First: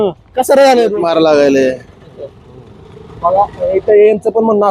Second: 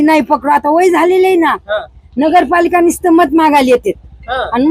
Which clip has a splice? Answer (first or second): first